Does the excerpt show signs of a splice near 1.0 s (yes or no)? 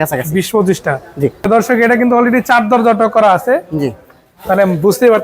yes